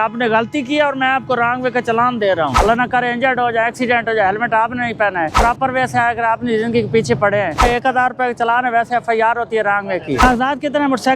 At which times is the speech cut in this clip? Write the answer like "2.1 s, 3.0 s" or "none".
2.5 s, 5.4 s, 7.6 s, 10.2 s